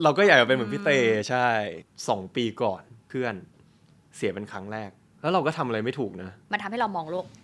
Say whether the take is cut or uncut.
cut